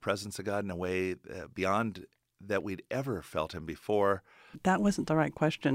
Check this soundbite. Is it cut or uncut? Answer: cut